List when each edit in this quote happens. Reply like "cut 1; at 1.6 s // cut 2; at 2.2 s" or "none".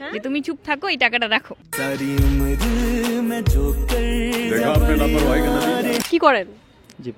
none